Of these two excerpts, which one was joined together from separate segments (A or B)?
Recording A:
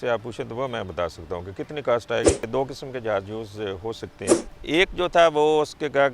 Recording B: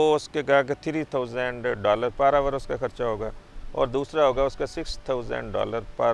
A